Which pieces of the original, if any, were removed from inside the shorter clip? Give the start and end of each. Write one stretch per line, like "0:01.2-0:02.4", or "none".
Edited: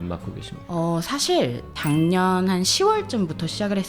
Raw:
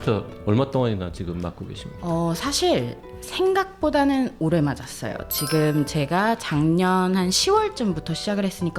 0:03.1-0:06.4